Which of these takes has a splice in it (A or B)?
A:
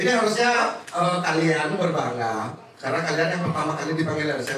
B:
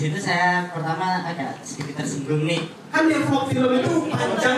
B